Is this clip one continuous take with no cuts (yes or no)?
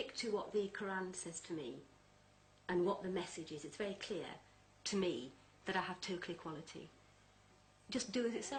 yes